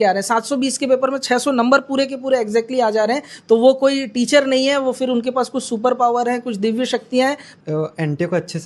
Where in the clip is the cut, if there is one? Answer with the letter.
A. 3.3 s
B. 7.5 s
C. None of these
B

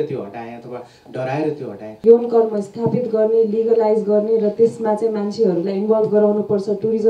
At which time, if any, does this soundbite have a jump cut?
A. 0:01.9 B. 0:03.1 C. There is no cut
A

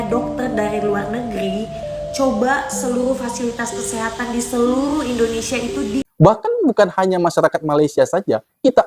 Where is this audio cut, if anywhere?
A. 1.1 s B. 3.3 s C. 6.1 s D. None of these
C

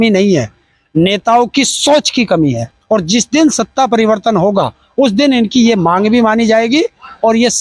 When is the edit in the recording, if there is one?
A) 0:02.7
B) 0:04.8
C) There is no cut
A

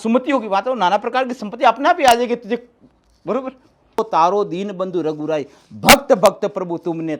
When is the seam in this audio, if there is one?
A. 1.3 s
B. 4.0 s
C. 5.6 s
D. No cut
B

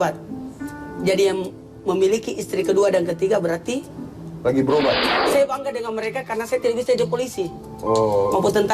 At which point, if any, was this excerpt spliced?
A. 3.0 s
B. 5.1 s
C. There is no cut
B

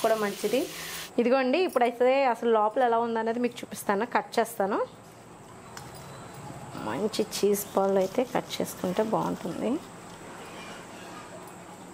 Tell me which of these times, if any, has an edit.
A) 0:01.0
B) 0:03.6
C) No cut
A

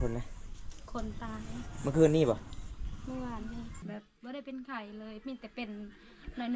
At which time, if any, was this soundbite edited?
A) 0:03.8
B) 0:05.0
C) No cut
A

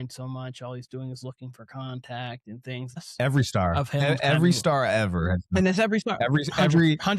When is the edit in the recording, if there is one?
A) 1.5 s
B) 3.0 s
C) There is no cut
B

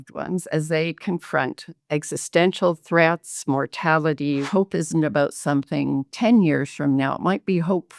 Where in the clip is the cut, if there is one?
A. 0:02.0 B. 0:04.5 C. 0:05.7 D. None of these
B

